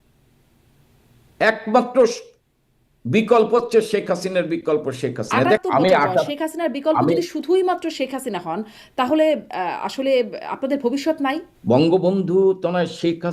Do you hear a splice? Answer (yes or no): yes